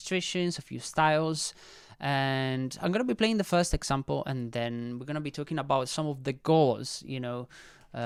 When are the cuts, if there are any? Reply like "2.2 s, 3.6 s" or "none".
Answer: none